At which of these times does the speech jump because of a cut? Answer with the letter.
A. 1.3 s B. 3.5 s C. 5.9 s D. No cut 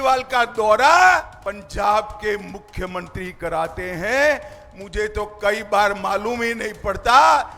A